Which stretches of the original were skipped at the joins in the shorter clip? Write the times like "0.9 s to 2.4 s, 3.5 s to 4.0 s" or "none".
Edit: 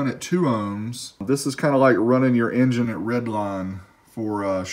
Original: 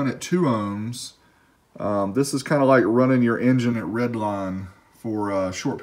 1.2 s to 2.1 s

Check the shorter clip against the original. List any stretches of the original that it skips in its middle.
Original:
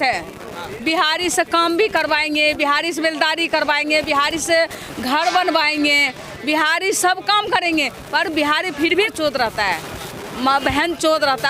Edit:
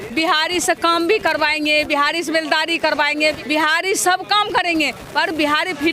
4.1 s to 6.3 s

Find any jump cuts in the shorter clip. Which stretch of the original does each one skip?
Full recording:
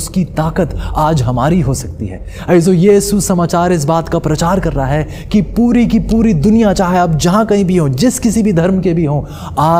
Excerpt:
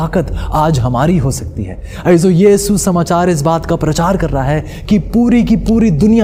none

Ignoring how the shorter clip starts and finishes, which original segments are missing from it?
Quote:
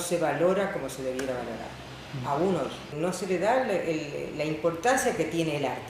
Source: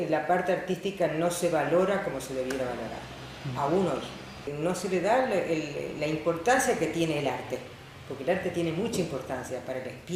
4.2 s to 4.5 s

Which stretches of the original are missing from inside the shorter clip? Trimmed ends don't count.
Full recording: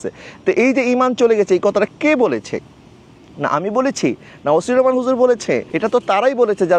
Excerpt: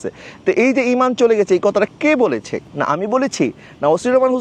2.6 s to 3.2 s

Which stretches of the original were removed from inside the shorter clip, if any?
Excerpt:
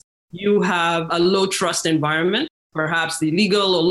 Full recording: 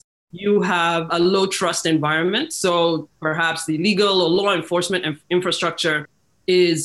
2.6 s to 3.0 s

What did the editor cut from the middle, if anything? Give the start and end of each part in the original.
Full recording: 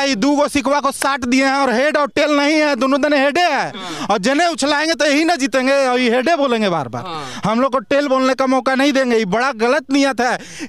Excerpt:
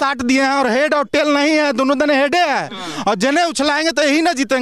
none

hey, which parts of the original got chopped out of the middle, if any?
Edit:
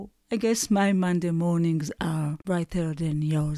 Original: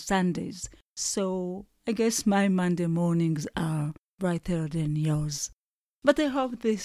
3.9 s to 4.1 s

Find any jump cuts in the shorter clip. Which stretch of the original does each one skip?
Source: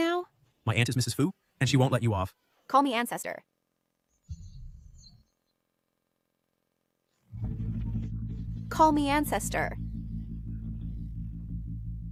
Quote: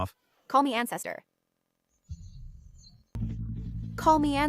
5.4 s to 7.9 s

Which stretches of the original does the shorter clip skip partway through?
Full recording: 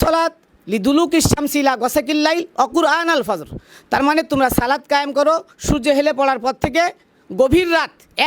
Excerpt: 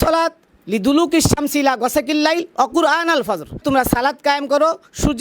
3.6 s to 4.3 s

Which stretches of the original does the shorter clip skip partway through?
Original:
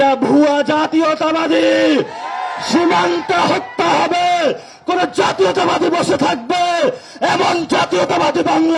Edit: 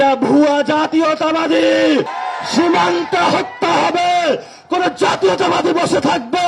2.2 s to 2.4 s

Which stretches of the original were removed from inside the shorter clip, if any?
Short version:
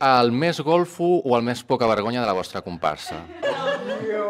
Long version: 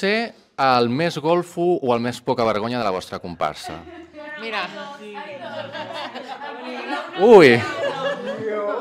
4.0 s to 7.8 s

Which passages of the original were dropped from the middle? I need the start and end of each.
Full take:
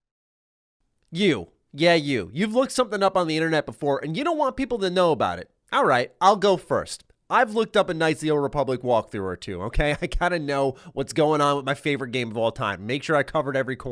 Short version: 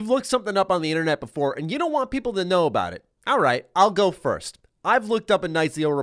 none

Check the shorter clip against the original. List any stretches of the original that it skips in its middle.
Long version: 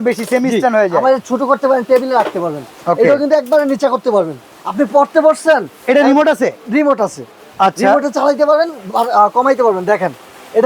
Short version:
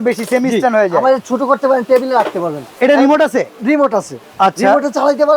2.7 s to 5.7 s, 7.3 s to 7.4 s

